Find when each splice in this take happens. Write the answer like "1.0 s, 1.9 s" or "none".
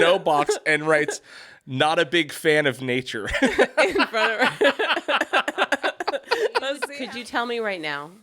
6.9 s